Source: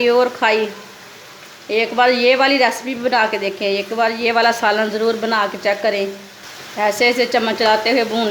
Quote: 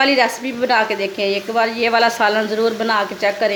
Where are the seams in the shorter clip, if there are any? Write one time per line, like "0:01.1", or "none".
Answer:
none